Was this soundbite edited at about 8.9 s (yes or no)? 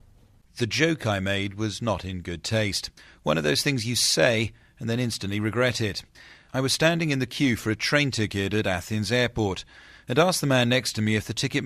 no